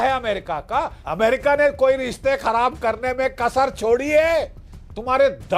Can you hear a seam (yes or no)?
yes